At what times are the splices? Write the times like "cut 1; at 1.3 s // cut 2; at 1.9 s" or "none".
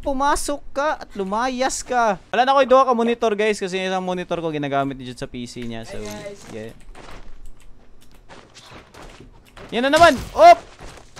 cut 1; at 2.2 s